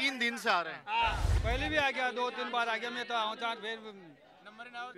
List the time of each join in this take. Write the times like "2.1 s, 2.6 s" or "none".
1.3 s